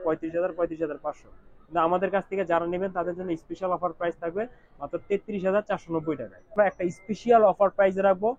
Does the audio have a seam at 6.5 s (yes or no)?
yes